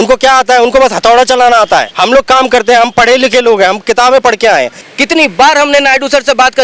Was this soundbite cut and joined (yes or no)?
yes